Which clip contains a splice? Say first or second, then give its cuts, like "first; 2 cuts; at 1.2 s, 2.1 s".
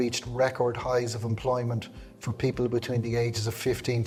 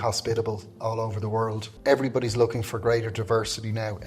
second; 1 cut; at 1.7 s